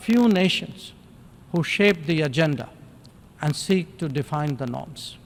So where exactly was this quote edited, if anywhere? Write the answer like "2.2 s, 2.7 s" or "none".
none